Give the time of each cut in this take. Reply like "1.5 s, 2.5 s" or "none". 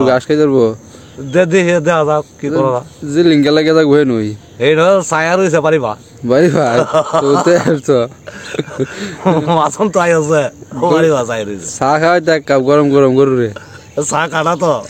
none